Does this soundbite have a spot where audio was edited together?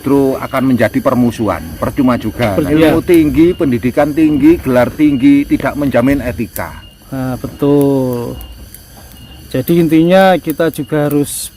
yes; 1 cut; at 2.7 s

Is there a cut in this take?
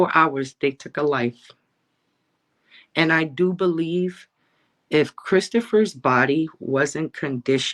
no; 0 cuts

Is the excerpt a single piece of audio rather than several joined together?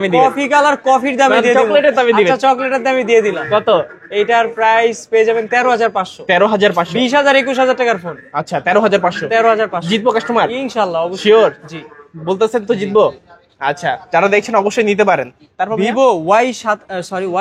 yes; 0 cuts

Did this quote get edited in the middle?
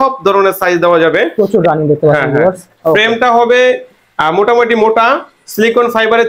yes; 1 cut; at 1.3 s

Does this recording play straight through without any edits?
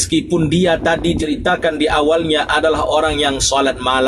no; 1 cut; at 1.2 s

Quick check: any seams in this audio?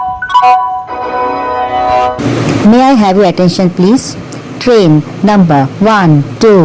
yes; 1 cut; at 2.2 s

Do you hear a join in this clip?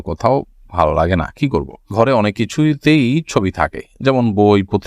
yes; 1 cut; at 1.9 s

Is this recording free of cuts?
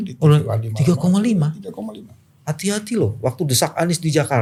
yes; 0 cuts

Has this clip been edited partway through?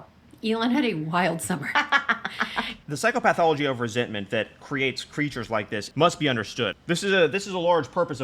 yes; 1 cut; at 2.7 s

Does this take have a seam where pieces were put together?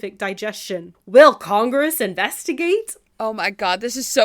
yes; 2 cuts; at 0.9 s, 3.0 s

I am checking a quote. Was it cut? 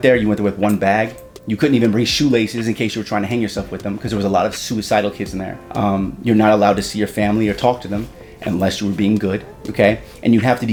no; 0 cuts

